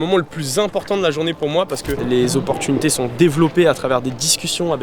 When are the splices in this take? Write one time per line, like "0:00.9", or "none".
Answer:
0:02.0